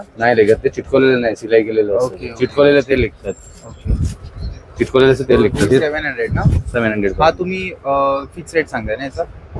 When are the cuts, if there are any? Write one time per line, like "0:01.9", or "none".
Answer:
none